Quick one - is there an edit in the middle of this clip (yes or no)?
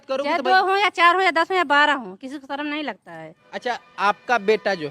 yes